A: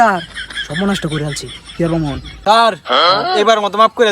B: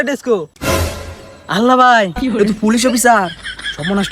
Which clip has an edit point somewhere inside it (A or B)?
A